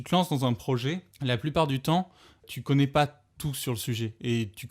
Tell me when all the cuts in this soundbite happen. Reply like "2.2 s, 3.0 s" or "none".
1.1 s, 2.5 s